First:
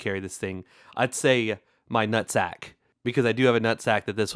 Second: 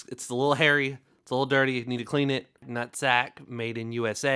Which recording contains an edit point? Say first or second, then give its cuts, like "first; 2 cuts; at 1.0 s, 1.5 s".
second; 1 cut; at 2.7 s